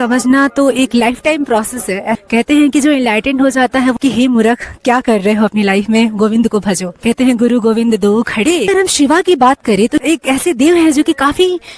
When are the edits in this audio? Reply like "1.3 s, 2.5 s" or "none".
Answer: 2.2 s, 4.0 s, 6.9 s, 8.7 s, 10.0 s